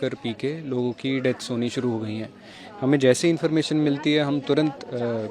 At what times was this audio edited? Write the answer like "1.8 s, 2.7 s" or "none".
none